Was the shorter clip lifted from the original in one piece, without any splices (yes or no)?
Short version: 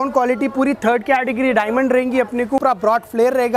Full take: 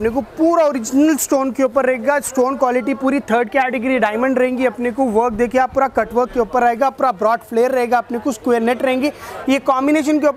no